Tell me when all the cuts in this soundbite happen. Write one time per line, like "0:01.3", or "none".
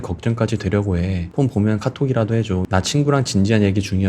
0:02.6